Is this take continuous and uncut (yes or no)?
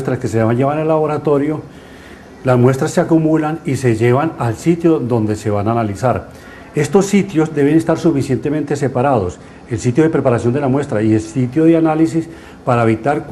no